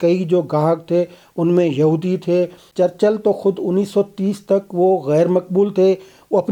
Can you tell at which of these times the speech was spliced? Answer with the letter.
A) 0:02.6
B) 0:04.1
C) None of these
A